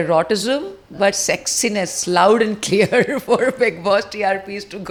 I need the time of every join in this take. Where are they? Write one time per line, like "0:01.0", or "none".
none